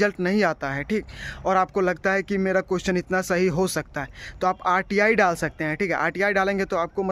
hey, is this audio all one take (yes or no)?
yes